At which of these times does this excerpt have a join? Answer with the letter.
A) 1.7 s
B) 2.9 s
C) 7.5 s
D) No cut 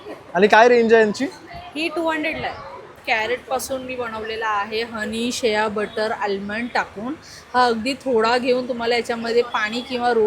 B